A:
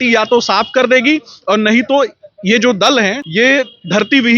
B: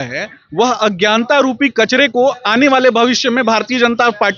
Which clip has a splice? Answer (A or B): A